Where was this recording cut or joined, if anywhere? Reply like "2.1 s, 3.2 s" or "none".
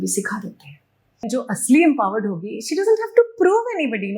1.2 s